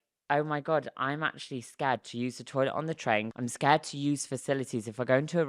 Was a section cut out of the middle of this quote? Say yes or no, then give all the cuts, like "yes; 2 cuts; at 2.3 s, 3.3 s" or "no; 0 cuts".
yes; 1 cut; at 3.3 s